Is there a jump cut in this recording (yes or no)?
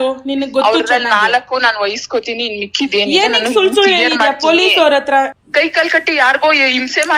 yes